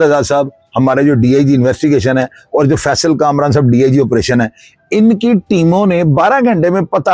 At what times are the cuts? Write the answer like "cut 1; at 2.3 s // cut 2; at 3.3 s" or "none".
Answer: none